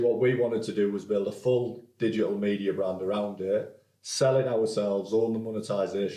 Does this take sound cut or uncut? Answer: uncut